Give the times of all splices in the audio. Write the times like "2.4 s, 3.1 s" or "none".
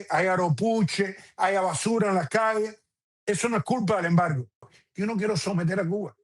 4.8 s